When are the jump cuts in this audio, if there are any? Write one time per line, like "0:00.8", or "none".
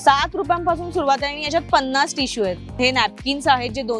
0:02.7

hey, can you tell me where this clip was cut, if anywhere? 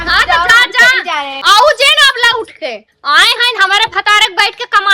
0:01.3

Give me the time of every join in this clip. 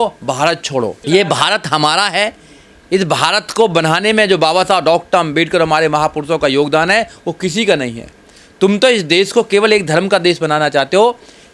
0:01.0

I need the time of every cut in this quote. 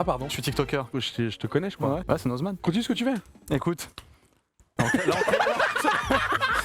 0:00.9
0:02.6

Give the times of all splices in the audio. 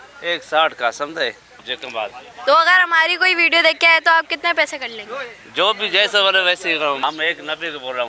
0:01.7
0:07.0

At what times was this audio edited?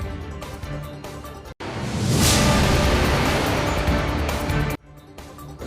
0:01.1

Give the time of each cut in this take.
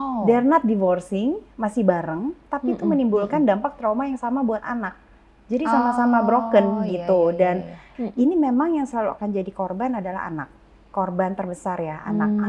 0:07.9

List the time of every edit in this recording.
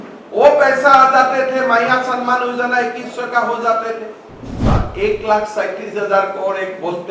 0:04.5

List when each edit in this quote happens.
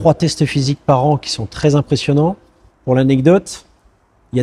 none

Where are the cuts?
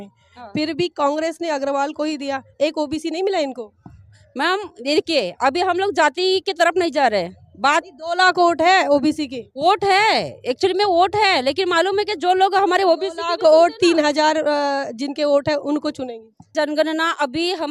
0:16.4

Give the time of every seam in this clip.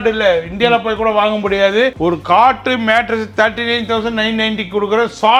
none

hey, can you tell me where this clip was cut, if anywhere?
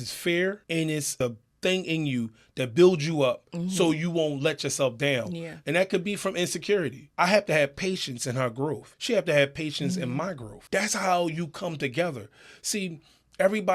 0:01.0
0:07.0
0:08.9
0:10.5

